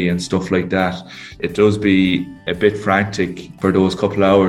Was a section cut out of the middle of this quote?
yes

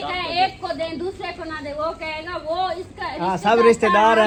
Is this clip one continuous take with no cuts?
yes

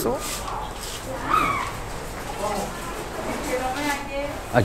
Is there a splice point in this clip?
yes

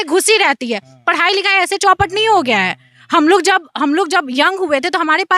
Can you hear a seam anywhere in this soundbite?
no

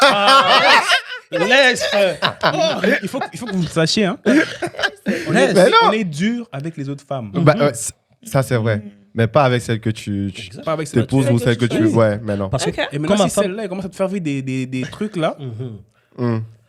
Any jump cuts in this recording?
no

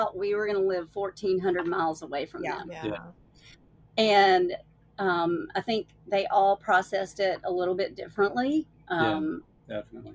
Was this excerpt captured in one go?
yes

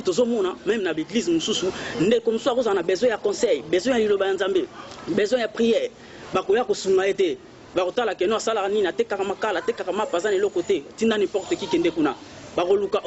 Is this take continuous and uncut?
yes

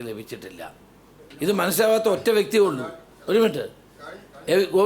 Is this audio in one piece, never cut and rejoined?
no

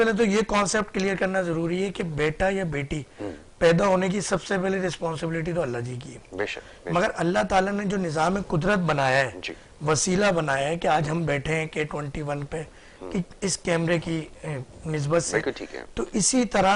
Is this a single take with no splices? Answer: yes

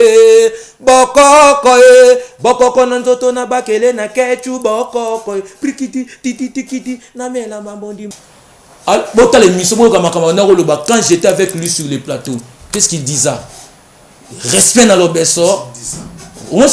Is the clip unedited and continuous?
no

